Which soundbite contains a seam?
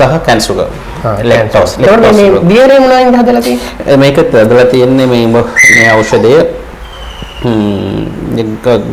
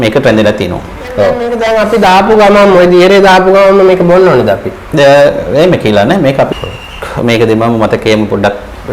second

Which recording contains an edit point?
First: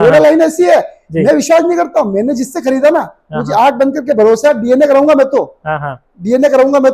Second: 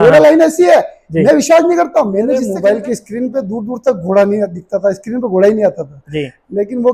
second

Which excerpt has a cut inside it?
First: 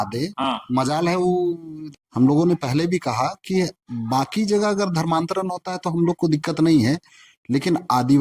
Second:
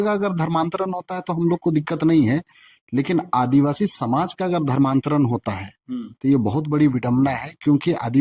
first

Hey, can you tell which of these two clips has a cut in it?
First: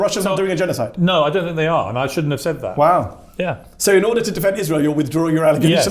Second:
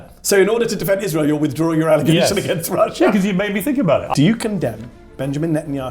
second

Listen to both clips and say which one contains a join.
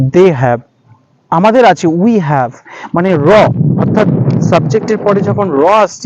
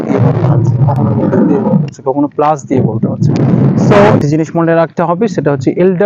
second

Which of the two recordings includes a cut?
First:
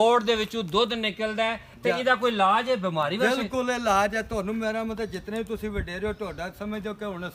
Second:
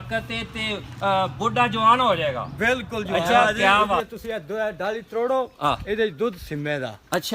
second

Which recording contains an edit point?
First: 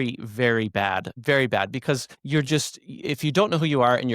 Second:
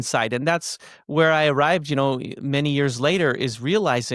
first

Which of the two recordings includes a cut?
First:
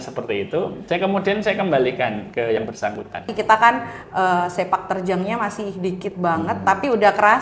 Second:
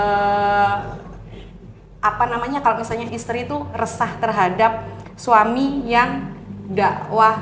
first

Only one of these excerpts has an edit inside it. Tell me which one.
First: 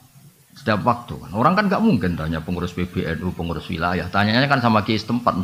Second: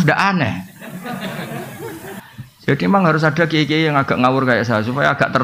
second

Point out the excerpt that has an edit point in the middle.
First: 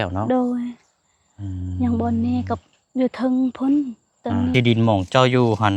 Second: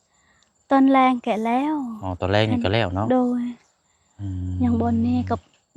first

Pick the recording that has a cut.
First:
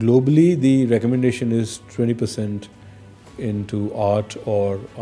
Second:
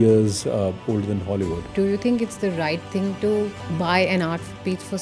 second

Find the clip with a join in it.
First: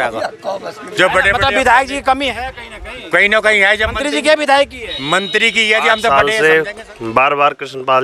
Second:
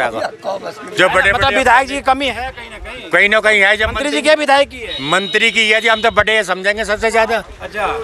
first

